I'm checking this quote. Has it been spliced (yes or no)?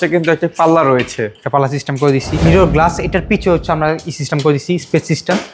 yes